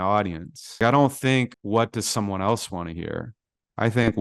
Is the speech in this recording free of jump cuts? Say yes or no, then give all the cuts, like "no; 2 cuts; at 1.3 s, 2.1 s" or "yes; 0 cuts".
no; 2 cuts; at 0.8 s, 1.6 s